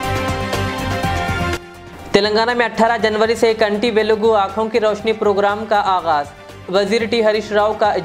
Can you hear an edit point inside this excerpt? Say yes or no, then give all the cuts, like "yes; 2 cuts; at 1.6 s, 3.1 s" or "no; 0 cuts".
yes; 1 cut; at 1.5 s